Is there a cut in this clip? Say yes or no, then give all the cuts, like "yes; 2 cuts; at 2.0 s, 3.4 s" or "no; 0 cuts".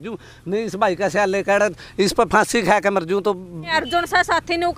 yes; 1 cut; at 3.7 s